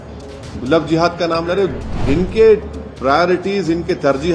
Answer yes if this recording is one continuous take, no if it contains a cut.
no